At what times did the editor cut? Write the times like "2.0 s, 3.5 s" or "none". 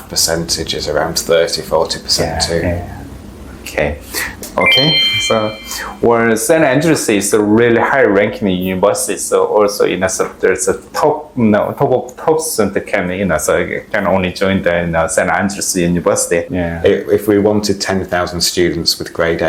16.5 s